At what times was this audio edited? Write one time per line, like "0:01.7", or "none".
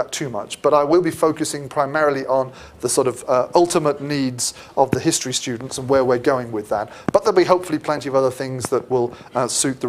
0:03.5